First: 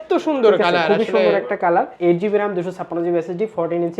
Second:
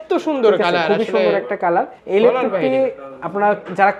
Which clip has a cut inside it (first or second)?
first